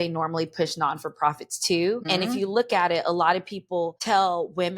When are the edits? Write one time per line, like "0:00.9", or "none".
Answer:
0:02.0
0:04.0